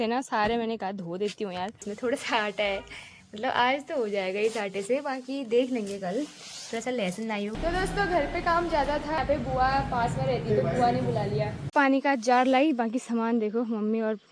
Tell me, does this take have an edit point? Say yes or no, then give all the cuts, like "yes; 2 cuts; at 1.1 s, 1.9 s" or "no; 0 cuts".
yes; 4 cuts; at 1.9 s, 7.6 s, 9.2 s, 11.6 s